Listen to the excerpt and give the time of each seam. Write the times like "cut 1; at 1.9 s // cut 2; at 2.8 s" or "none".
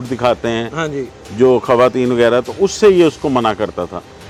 none